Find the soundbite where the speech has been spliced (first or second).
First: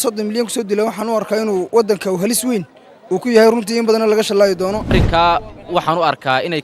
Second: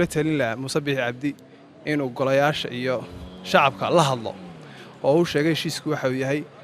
first